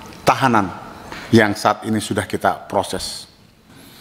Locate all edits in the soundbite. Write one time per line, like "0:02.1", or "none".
none